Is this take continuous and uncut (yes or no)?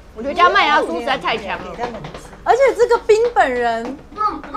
no